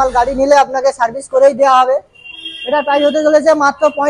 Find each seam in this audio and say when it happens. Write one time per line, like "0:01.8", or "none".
none